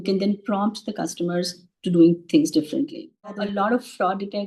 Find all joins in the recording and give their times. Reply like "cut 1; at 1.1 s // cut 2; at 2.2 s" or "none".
cut 1; at 3.4 s